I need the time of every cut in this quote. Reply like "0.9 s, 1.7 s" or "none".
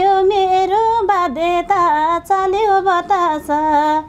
none